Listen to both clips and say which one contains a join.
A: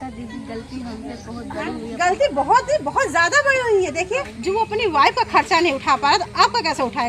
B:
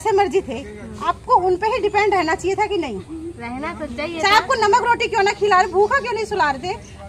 A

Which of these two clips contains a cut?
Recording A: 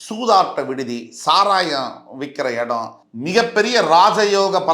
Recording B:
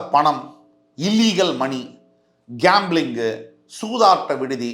A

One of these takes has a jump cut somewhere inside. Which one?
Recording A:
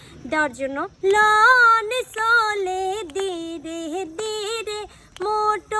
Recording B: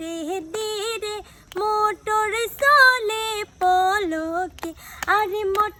A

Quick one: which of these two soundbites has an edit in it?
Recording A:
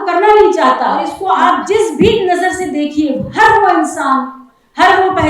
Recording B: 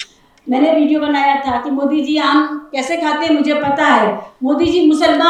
A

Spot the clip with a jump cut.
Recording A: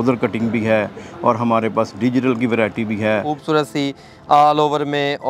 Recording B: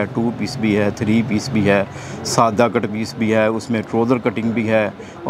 A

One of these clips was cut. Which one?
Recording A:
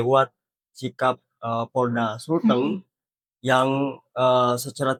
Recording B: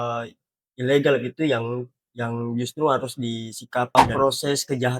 B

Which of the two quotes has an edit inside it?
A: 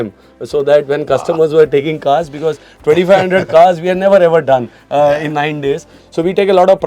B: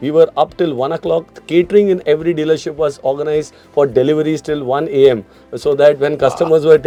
A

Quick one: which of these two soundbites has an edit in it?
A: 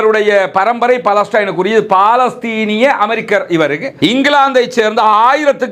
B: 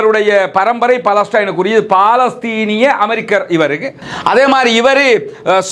A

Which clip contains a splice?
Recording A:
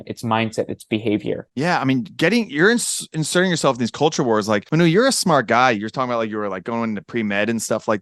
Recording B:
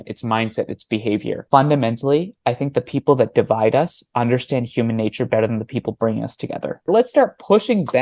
B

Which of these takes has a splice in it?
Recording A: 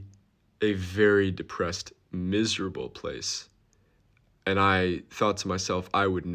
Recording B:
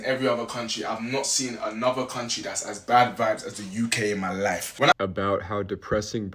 B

